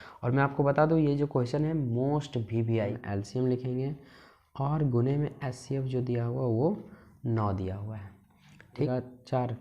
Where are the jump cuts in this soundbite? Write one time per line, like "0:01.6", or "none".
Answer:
0:03.0
0:08.9